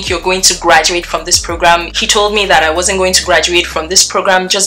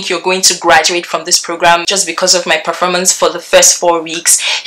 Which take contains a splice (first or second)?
second